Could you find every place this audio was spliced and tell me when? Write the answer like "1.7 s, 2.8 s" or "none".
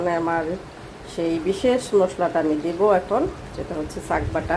none